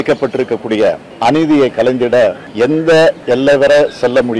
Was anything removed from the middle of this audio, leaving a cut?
yes; 3 cuts; at 1.1 s, 2.4 s, 3.2 s

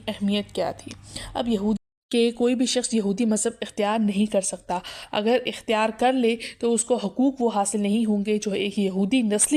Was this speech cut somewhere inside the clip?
yes; 1 cut; at 1.8 s

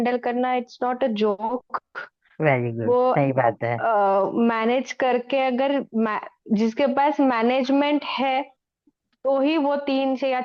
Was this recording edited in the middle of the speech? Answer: no; 0 cuts

